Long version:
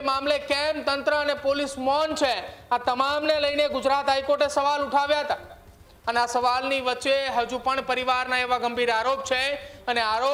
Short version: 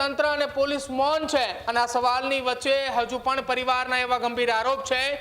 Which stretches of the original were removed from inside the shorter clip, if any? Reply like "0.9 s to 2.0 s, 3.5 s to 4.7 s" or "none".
2.5 s to 6.0 s